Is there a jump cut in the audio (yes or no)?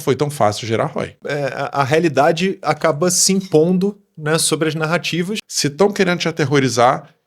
yes